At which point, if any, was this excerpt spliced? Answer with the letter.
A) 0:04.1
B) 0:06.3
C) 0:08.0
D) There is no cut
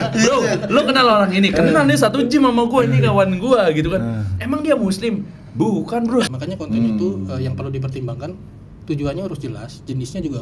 B